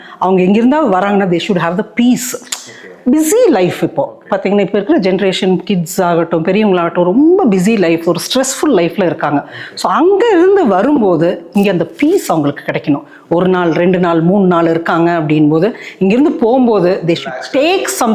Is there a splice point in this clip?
no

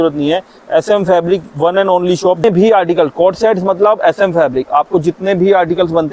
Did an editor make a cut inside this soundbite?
yes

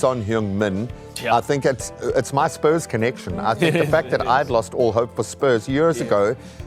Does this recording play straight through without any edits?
yes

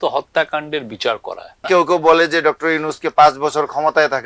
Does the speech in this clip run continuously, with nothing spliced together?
no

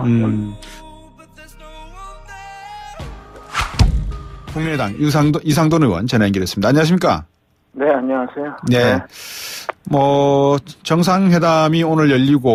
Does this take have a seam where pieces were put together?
no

